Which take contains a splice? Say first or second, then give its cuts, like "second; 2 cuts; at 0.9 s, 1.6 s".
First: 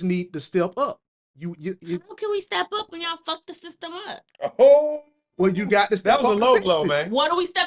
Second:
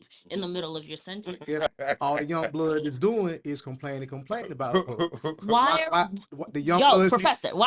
second; 1 cut; at 1.7 s